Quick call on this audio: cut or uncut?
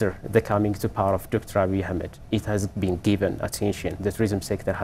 uncut